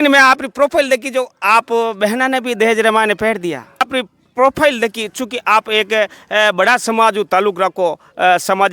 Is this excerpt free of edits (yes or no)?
no